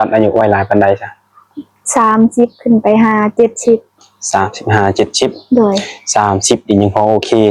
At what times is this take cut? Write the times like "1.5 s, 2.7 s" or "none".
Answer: none